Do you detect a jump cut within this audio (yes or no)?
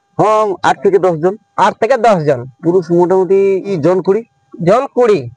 yes